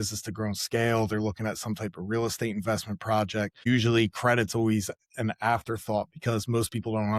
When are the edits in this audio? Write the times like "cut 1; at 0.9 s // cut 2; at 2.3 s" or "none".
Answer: cut 1; at 3.7 s